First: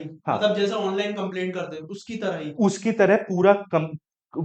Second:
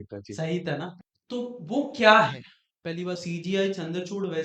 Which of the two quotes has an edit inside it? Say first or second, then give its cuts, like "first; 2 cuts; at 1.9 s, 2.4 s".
second; 2 cuts; at 0.9 s, 3.2 s